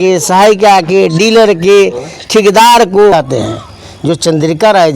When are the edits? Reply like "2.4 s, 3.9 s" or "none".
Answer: 3.1 s